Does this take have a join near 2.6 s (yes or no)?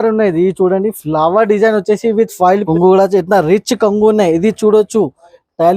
yes